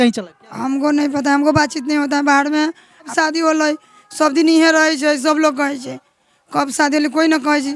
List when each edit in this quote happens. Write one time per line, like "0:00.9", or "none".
0:03.1